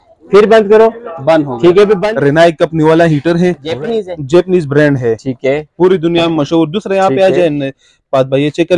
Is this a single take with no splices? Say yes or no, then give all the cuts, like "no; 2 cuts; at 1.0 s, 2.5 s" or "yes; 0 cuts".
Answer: no; 2 cuts; at 2.0 s, 3.7 s